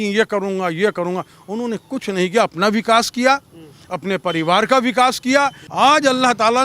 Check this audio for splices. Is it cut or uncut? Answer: cut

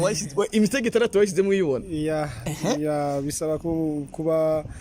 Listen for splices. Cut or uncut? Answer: uncut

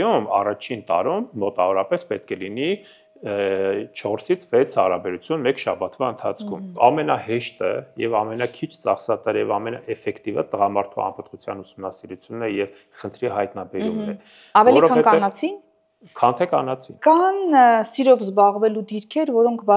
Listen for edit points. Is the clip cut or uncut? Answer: cut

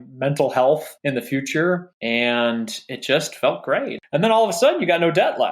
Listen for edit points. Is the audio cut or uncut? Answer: cut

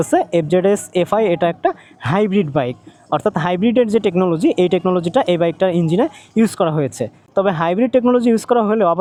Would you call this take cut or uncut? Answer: uncut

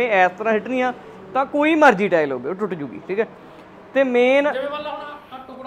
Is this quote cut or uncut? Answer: uncut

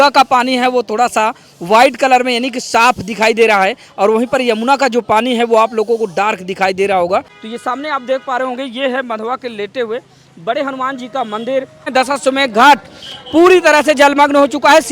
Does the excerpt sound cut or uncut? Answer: cut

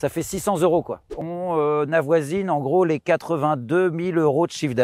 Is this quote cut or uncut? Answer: cut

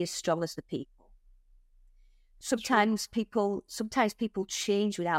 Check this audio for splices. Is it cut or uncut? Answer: uncut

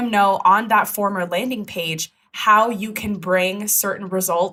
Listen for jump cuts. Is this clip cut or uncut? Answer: uncut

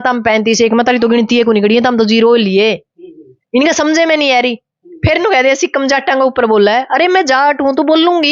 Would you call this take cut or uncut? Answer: uncut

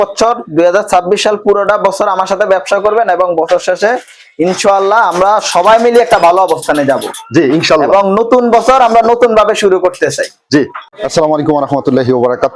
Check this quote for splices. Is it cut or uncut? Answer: uncut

